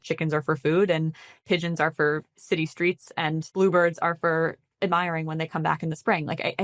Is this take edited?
yes; 2 cuts; at 1.4 s, 3.5 s

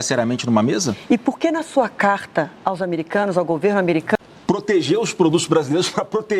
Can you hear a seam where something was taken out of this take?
yes; 1 cut; at 4.2 s

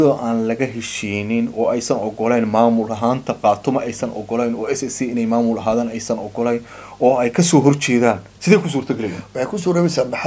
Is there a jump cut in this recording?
no; 0 cuts

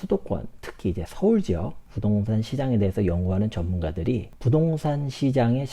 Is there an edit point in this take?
yes; 2 cuts; at 1.8 s, 4.3 s

